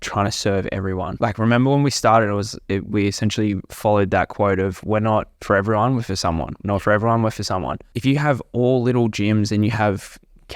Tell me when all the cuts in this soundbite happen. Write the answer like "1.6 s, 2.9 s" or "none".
1.1 s, 7.9 s